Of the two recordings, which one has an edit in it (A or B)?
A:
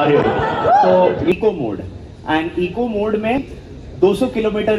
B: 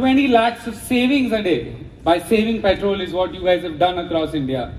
A